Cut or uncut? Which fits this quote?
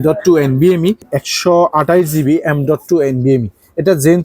cut